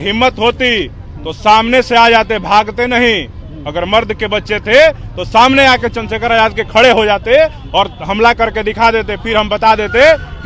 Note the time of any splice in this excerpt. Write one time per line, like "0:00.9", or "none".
none